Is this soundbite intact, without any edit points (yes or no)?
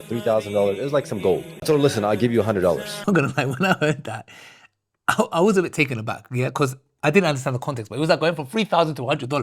no